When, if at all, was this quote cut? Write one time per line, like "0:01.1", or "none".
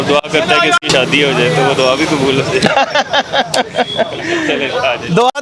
none